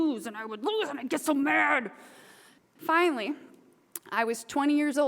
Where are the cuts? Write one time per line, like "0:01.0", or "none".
0:02.6